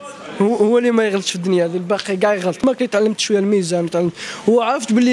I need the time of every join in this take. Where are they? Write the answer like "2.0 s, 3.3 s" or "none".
2.6 s